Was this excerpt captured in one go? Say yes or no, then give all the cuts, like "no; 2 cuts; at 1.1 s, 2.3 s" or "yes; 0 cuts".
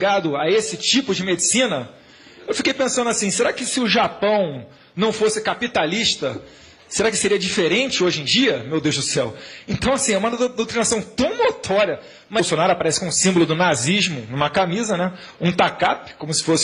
yes; 0 cuts